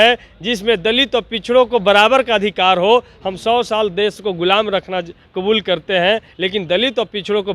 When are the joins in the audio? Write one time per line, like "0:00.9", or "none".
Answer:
0:06.3

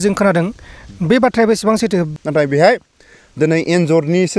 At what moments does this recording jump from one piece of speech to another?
0:02.1

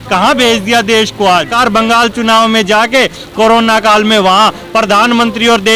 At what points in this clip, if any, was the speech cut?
0:01.5

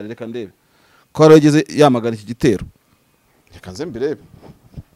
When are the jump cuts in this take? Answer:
none

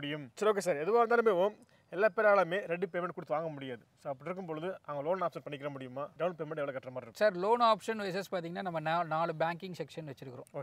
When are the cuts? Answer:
none

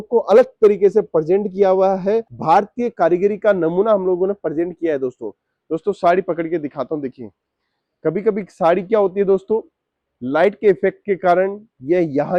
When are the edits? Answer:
none

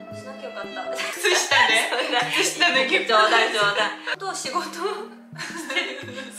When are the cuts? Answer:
0:04.1

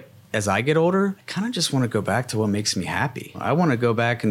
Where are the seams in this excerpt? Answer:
0:01.2
0:03.4

